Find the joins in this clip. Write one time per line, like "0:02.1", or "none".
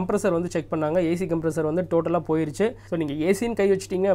0:02.8